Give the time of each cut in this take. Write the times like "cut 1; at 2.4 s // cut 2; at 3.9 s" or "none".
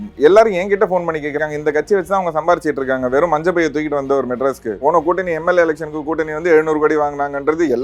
cut 1; at 1.4 s // cut 2; at 4.8 s